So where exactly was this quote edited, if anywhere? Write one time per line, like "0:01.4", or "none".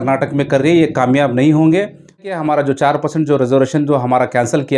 0:02.2